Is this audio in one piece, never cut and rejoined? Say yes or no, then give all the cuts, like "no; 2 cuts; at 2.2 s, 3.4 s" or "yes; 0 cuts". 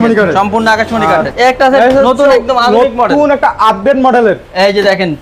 no; 1 cut; at 1.3 s